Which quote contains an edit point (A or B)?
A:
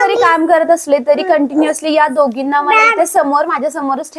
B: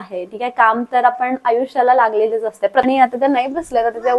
B